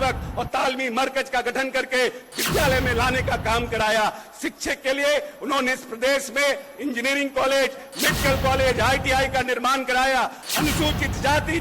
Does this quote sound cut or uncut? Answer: cut